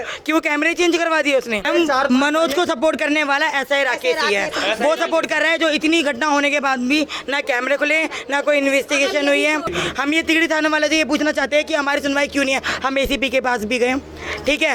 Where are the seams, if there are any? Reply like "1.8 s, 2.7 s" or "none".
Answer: 1.7 s, 9.7 s